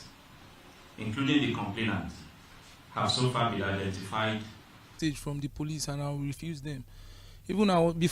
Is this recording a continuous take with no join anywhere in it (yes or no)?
no